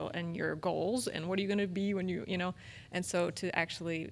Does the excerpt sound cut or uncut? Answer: uncut